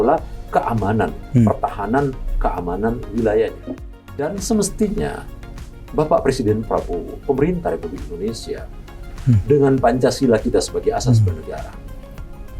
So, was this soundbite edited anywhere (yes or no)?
yes